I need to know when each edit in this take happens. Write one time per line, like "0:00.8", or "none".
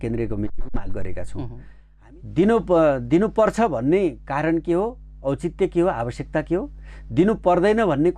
0:01.8